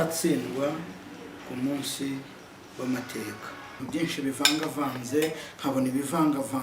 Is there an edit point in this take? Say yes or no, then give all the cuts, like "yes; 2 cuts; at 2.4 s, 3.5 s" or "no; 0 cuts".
yes; 1 cut; at 3.8 s